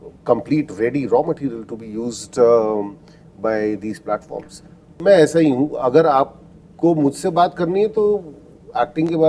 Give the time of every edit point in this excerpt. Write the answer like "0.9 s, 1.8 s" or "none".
5.0 s